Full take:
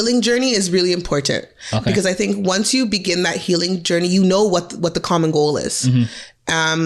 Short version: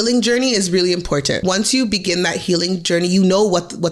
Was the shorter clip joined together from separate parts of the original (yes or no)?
yes